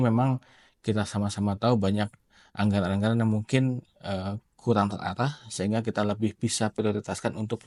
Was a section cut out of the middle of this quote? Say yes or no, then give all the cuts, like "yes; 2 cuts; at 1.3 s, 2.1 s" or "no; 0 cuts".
no; 0 cuts